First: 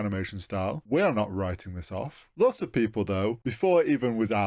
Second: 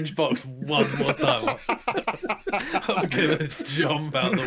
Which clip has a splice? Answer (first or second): first